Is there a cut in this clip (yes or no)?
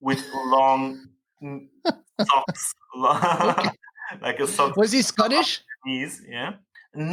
no